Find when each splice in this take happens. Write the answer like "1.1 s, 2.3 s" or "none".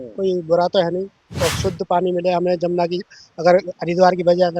1.2 s